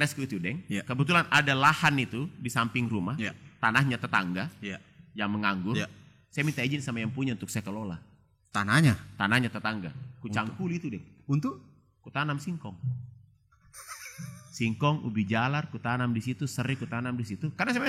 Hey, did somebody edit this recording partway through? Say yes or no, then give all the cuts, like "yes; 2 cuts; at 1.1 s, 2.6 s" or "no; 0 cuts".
no; 0 cuts